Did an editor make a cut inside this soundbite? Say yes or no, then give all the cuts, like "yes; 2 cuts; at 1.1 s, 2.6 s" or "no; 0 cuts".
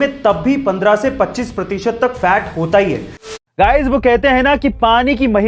yes; 1 cut; at 3.3 s